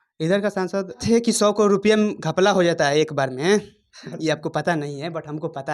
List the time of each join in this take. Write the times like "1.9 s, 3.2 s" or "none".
1.0 s